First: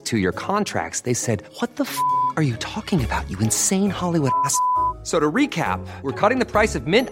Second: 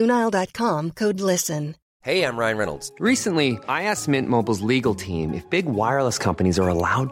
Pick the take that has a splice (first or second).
second